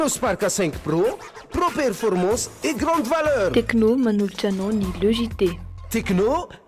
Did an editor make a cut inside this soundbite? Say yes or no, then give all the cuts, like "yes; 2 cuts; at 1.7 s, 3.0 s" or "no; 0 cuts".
no; 0 cuts